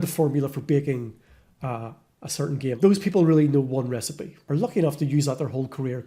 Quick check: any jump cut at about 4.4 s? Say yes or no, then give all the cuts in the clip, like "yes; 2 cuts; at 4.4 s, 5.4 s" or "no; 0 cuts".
yes; 2 cuts; at 2.7 s, 4.4 s